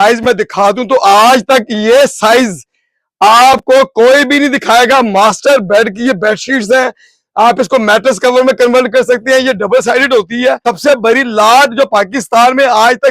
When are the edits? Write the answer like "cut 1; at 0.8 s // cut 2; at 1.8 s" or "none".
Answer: cut 1; at 10.7 s

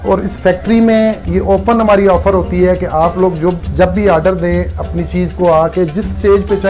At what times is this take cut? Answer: none

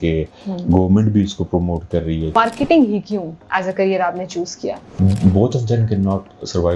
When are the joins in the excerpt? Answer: cut 1; at 2.4 s // cut 2; at 4.9 s

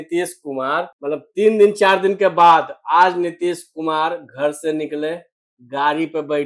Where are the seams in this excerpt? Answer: cut 1; at 0.9 s

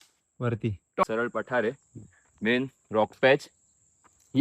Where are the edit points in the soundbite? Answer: cut 1; at 1.0 s

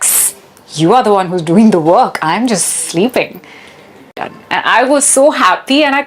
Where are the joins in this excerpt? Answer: cut 1; at 4.2 s

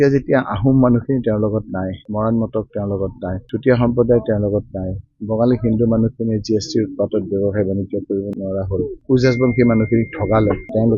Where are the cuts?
none

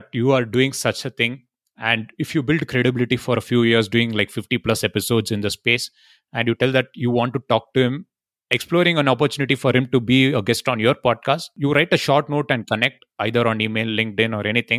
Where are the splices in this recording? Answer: cut 1; at 11.5 s

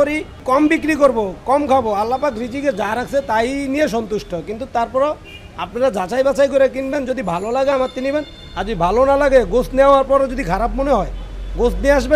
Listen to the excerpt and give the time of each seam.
none

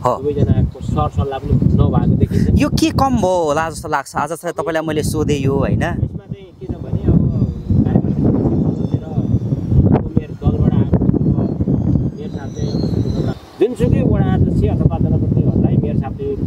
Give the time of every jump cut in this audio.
cut 1; at 13.3 s

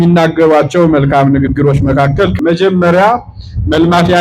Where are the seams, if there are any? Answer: cut 1; at 2.3 s

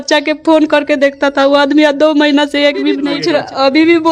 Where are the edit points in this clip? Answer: cut 1; at 3.1 s

